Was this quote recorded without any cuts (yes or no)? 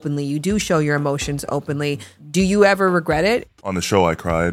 no